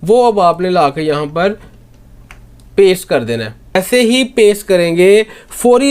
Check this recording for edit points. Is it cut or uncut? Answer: cut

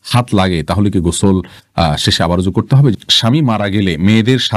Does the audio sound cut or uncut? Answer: cut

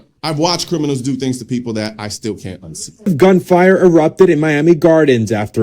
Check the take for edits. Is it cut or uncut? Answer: cut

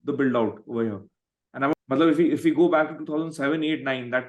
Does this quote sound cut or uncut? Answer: cut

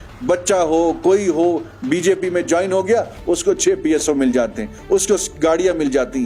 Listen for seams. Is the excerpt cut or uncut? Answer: uncut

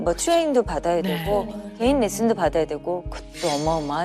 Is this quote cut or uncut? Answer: uncut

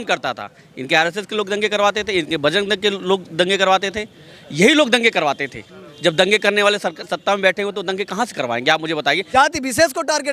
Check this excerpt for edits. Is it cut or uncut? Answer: cut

